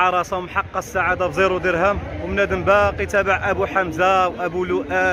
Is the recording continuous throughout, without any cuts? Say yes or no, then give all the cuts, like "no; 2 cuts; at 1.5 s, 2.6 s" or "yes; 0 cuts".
yes; 0 cuts